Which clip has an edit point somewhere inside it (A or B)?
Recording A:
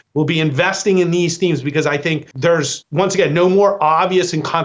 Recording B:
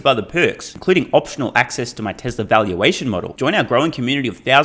A